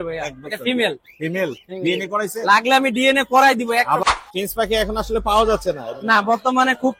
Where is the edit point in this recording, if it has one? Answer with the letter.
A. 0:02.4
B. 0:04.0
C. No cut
B